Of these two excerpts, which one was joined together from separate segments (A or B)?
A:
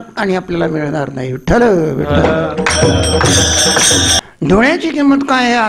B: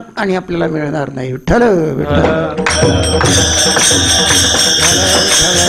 A